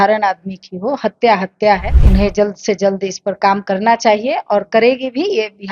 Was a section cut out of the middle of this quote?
yes; 1 cut; at 1.9 s

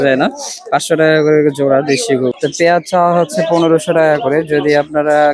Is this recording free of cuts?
no; 1 cut; at 2.3 s

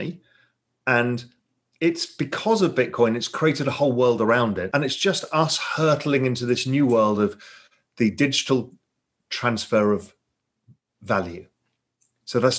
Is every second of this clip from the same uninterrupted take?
no; 1 cut; at 4.6 s

